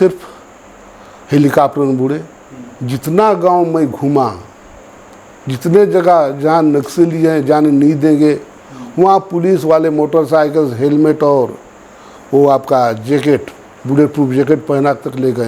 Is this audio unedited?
yes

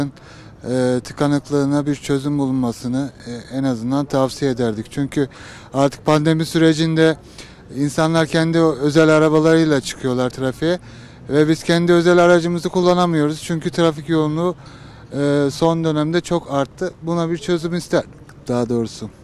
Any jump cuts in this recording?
no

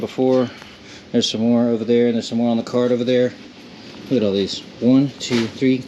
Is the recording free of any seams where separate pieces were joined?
yes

